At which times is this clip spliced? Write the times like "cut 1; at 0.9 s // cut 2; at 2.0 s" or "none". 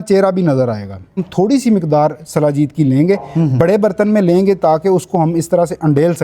cut 1; at 1.3 s